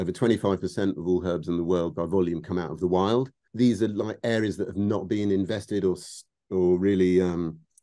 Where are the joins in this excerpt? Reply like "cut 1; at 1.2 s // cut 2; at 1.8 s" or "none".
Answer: cut 1; at 3.5 s